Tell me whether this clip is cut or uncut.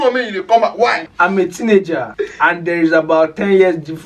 cut